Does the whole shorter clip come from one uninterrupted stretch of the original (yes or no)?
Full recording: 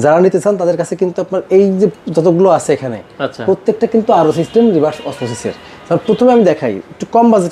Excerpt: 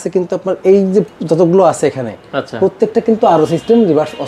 yes